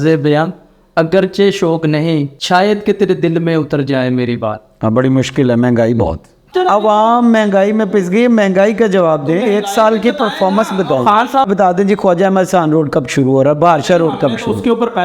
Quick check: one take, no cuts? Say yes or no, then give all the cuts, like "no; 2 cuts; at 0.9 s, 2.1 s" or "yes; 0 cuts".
no; 3 cuts; at 2.4 s, 6.5 s, 11.5 s